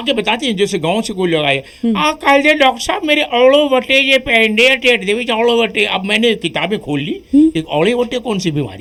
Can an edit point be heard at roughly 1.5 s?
no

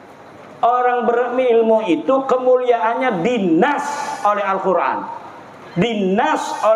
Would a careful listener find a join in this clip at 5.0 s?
no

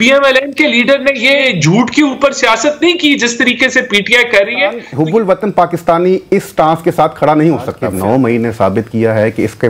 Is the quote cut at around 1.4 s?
yes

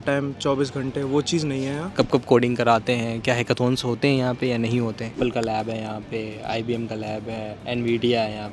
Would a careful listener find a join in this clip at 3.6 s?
no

